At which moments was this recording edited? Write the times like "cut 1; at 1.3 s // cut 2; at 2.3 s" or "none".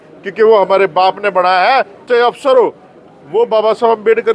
cut 1; at 2.1 s